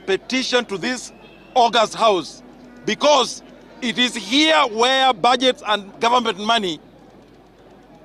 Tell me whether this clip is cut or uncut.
uncut